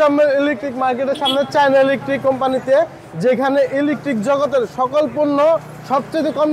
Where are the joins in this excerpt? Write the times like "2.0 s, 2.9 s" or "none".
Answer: none